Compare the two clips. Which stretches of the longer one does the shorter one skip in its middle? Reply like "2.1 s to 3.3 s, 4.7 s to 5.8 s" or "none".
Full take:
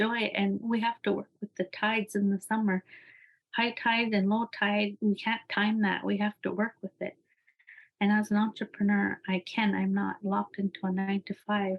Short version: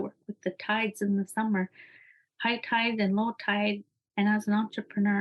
4.9 s to 7.6 s